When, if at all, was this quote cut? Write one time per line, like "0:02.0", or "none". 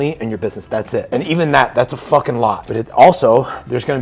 0:01.1
0:02.6